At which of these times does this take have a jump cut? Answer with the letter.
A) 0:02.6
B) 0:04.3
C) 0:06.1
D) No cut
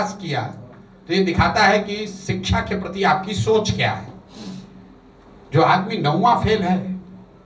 D